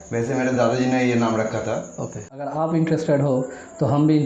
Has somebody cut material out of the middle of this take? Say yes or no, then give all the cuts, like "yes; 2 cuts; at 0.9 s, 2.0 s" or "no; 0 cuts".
yes; 1 cut; at 2.5 s